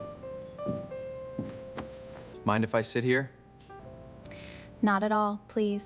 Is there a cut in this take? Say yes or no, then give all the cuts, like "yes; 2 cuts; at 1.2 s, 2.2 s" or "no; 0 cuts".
yes; 2 cuts; at 2.3 s, 3.8 s